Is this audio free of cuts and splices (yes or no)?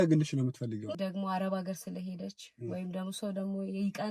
no